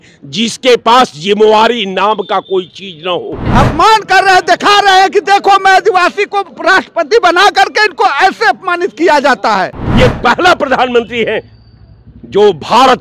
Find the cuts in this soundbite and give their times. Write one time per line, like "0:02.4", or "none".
0:03.4
0:09.8